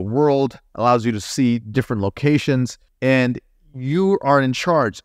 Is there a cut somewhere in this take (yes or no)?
yes